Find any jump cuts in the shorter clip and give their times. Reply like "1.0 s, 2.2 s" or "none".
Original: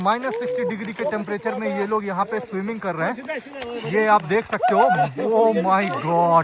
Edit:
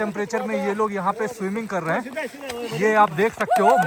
none